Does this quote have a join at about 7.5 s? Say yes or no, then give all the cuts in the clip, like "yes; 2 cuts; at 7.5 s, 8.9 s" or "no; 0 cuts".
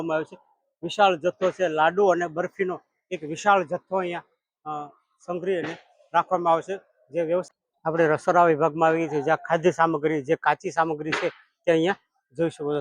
yes; 1 cut; at 7.5 s